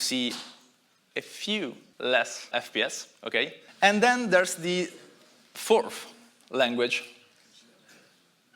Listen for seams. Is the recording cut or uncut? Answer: cut